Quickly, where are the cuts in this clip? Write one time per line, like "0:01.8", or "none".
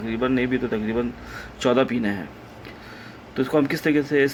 none